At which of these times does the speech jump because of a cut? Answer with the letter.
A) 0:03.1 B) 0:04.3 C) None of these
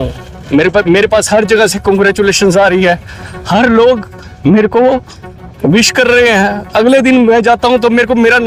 C